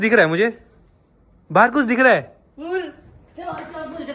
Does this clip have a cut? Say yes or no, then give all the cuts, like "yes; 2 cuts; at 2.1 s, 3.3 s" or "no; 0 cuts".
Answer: no; 0 cuts